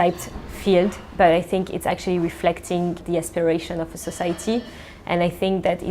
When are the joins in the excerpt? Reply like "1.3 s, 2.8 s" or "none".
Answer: 3.0 s